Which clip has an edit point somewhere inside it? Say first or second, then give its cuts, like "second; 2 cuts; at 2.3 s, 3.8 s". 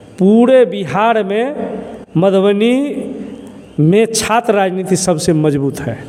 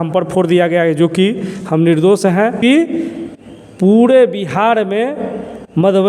second; 1 cut; at 2.6 s